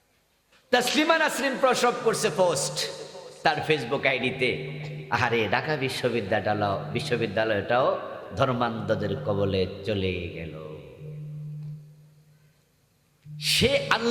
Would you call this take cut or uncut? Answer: uncut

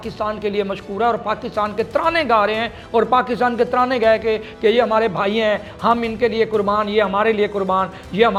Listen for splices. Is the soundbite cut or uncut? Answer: uncut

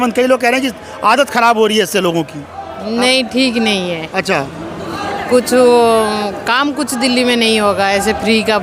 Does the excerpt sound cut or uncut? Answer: uncut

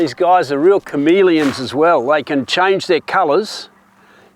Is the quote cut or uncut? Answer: uncut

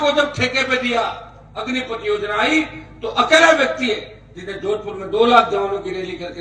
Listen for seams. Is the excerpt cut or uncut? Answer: uncut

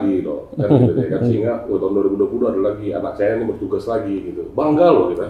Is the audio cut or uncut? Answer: uncut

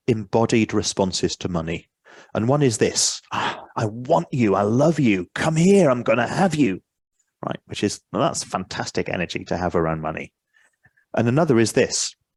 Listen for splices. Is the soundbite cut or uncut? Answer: uncut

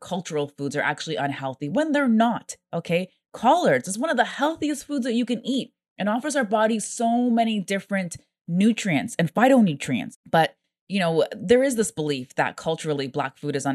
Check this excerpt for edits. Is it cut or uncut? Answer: cut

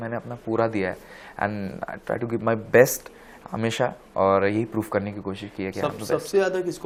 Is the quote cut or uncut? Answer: uncut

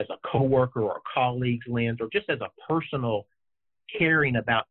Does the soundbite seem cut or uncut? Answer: uncut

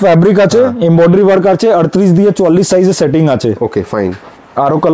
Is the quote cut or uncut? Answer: uncut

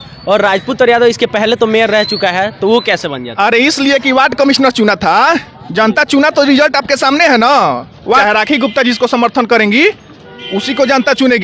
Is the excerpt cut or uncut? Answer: cut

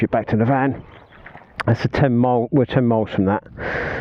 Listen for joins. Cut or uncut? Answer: uncut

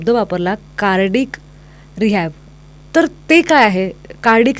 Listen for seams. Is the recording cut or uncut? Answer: uncut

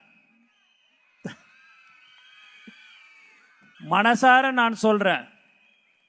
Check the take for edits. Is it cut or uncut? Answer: cut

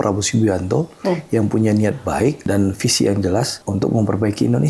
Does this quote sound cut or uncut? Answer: cut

